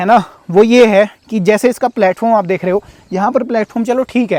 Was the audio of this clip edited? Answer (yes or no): no